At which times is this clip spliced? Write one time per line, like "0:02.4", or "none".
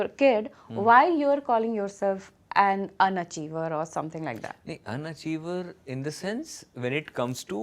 none